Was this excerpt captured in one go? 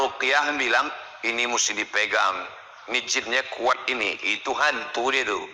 yes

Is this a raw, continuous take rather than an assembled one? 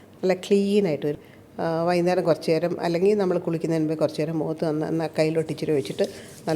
no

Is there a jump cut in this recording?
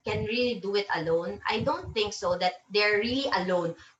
no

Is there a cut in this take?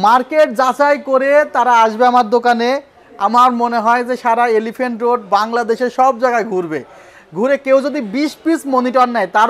no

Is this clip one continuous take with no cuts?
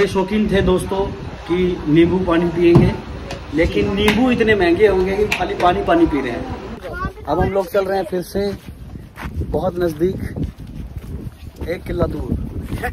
no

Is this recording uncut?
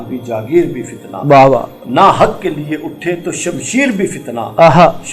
yes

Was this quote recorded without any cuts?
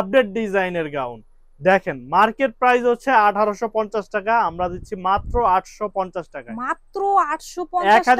yes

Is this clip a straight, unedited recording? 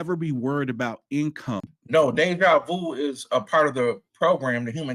no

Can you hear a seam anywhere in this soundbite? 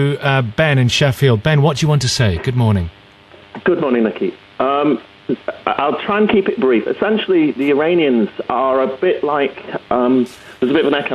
no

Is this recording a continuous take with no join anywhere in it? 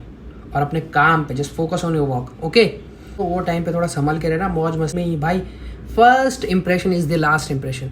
no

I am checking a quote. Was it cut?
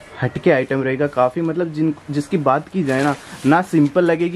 no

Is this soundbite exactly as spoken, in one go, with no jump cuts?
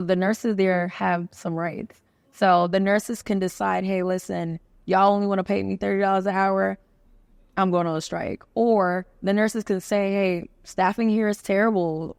yes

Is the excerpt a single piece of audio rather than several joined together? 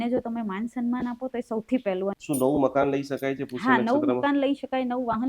no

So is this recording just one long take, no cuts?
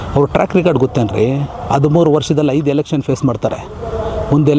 yes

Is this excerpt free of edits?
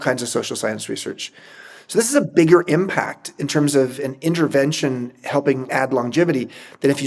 no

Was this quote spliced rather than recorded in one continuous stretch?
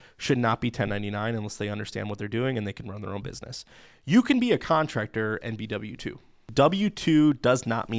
yes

